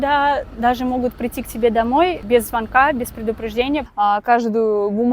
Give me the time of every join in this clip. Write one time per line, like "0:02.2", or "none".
0:02.2
0:03.9